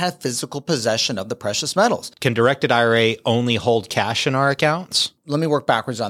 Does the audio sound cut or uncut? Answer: cut